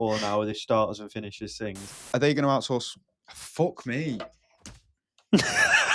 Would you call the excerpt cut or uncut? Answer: cut